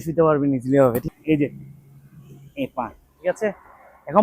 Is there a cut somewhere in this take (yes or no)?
yes